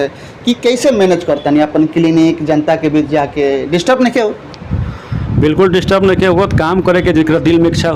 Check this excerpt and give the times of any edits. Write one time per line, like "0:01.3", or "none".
none